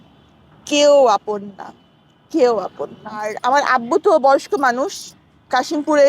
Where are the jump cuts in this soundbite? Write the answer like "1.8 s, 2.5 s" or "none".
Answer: 3.4 s